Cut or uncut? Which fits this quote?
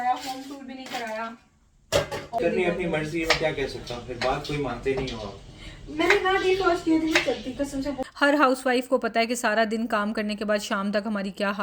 cut